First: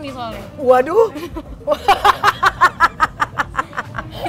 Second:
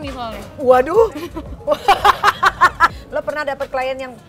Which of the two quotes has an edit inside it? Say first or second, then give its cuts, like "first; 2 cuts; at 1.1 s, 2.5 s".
second; 1 cut; at 2.9 s